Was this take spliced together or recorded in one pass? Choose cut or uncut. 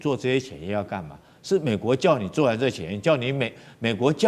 uncut